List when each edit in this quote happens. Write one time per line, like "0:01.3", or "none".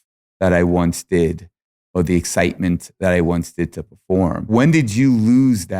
0:04.4